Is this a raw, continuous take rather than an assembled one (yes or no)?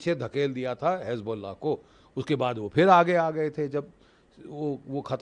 yes